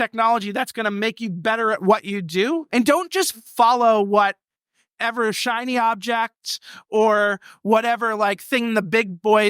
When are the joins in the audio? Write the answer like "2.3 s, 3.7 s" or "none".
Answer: 2.6 s